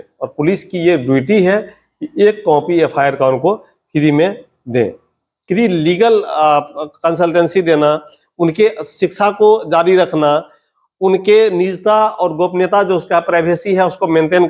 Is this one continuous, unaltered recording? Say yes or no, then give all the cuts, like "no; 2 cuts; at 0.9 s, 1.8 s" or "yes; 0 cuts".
no; 1 cut; at 5.4 s